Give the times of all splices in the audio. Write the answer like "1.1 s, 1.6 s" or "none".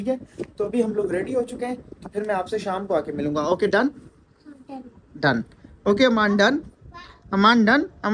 none